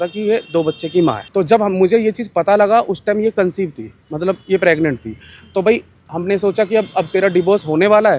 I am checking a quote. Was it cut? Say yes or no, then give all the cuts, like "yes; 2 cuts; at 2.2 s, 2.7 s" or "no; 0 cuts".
no; 0 cuts